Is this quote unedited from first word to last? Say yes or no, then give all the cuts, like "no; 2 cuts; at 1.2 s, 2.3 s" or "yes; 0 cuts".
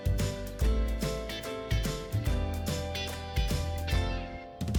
yes; 0 cuts